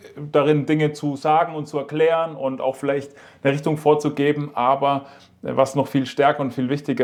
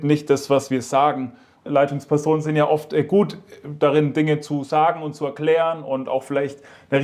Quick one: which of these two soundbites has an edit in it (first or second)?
second